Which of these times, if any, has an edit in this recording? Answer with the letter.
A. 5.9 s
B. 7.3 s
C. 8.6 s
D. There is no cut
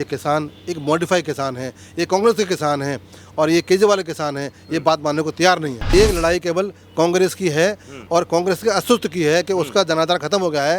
A